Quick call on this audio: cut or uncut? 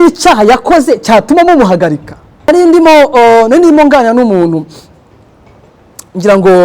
cut